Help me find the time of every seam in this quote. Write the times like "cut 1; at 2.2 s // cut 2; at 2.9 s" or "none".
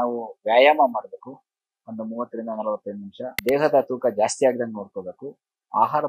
cut 1; at 3.3 s